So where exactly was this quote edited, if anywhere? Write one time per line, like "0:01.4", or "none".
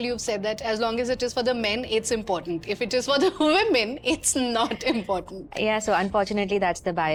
none